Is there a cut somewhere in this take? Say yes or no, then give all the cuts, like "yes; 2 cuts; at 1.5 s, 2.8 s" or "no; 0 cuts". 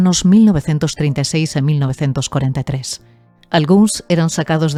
no; 0 cuts